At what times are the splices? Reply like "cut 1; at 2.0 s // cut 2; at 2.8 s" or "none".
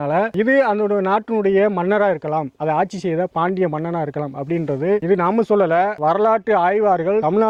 none